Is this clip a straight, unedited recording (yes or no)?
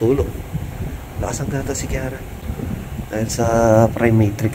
yes